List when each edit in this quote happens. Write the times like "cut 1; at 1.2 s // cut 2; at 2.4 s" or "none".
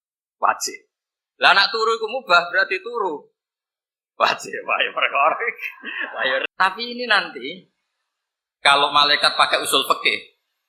cut 1; at 6.4 s